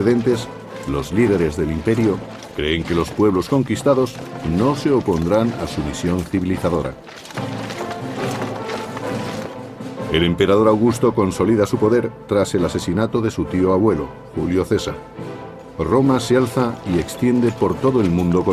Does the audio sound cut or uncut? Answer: cut